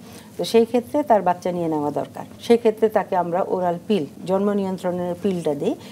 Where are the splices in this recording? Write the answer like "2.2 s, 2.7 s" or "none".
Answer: 2.3 s, 4.2 s